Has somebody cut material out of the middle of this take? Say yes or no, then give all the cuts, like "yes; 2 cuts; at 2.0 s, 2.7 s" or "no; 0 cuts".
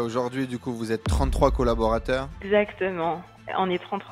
no; 0 cuts